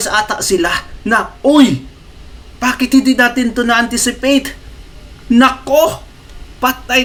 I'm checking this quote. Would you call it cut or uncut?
uncut